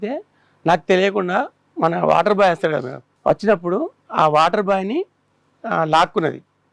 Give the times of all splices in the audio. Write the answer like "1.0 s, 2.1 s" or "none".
3.1 s